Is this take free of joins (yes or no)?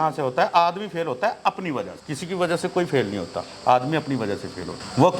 yes